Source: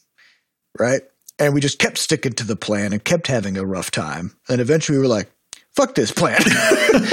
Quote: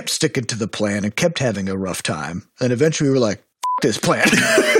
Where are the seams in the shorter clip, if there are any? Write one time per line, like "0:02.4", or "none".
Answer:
0:03.8